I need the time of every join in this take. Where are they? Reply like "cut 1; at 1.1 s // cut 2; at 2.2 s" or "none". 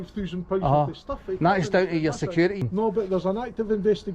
cut 1; at 2.6 s